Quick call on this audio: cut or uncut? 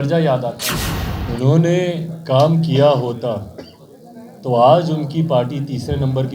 cut